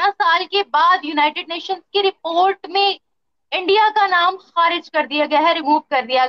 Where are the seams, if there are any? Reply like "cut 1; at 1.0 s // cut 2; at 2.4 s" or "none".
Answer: none